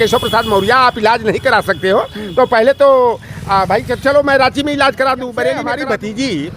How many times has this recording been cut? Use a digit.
1